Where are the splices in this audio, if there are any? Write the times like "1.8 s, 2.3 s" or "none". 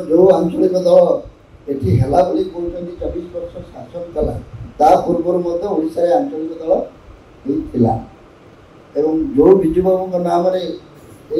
none